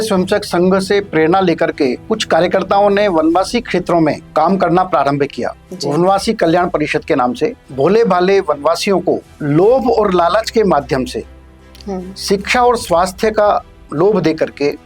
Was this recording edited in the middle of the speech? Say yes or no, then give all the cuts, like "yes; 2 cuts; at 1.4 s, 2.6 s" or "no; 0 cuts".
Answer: yes; 4 cuts; at 2.0 s, 4.2 s, 7.6 s, 9.3 s